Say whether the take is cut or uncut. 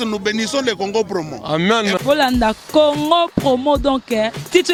uncut